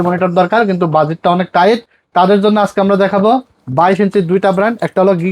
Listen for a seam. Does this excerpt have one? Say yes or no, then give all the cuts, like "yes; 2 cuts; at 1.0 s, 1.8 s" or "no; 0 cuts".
yes; 1 cut; at 2.0 s